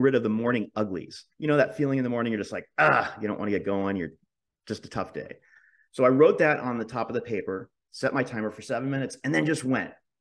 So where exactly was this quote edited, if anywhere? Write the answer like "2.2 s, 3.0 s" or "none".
1.3 s